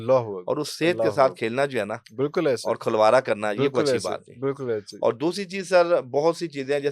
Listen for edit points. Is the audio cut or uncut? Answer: uncut